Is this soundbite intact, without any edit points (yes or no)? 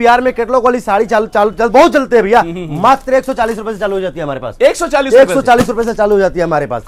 yes